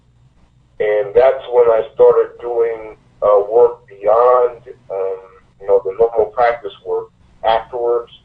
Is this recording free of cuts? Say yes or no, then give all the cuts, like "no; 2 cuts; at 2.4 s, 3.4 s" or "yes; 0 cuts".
yes; 0 cuts